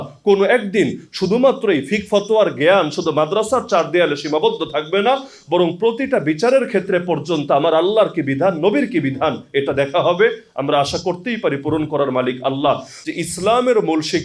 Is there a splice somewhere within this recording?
yes; 1 cut; at 12.9 s

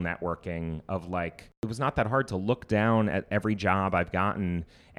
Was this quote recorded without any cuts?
no; 1 cut; at 1.6 s

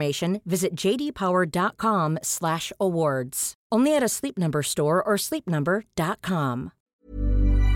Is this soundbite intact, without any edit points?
no; 1 cut; at 6.9 s

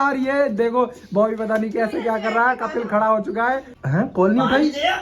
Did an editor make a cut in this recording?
yes; 1 cut; at 3.7 s

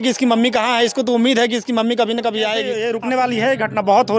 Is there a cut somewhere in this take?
yes; 1 cut; at 2.8 s

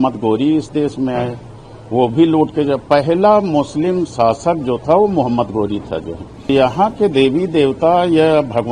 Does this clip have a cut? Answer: yes; 1 cut; at 6.5 s

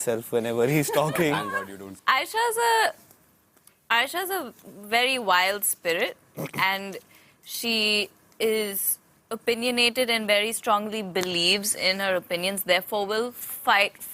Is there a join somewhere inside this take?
yes; 1 cut; at 1.9 s

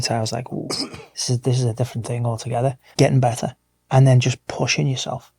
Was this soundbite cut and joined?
yes; 1 cut; at 2.8 s

